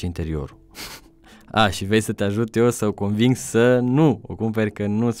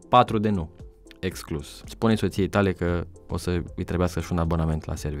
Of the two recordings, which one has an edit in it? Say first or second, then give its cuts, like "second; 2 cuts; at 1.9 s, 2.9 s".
second; 1 cut; at 1.8 s